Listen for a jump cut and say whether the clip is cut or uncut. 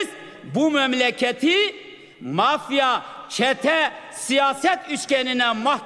uncut